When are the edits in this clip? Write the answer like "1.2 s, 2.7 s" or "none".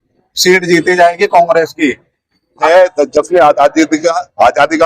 2.7 s

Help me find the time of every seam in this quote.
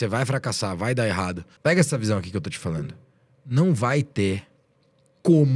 1.5 s

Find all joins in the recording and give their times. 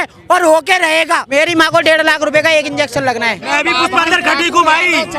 1.3 s, 3.4 s

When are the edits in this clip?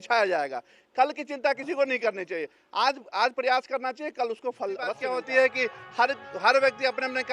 5.0 s

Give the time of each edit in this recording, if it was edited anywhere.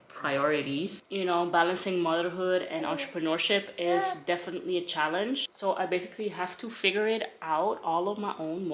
1.0 s, 5.5 s

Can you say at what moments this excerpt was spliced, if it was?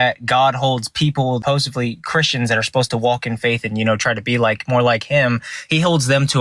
1.4 s

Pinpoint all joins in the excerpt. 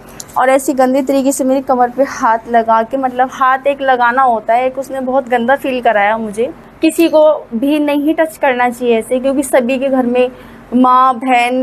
6.6 s

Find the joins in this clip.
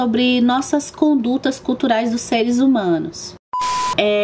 3.3 s

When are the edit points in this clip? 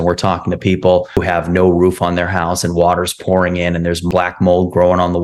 1.2 s, 4.1 s

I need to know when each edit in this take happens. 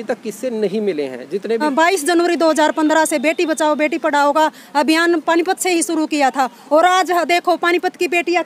1.6 s

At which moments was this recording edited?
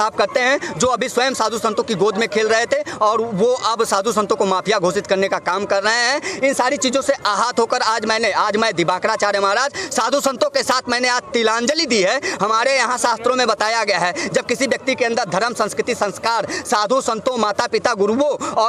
none

